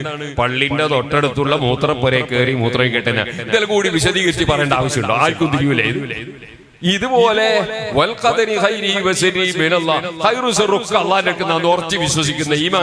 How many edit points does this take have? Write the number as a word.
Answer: zero